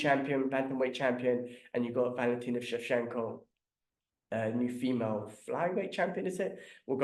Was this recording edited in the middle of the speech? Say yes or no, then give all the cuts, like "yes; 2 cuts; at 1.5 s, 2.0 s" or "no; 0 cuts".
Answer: no; 0 cuts